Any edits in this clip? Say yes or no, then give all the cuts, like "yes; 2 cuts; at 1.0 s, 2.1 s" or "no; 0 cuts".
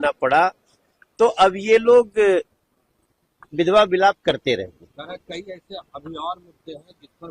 no; 0 cuts